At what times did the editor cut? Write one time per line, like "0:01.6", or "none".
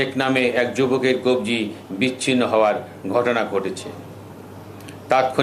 none